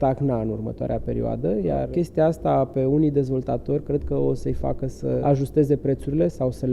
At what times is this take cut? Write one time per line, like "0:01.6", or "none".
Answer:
0:01.8
0:05.2